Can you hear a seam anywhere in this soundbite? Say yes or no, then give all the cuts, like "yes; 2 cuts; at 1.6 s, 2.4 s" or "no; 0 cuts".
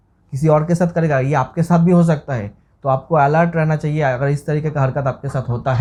no; 0 cuts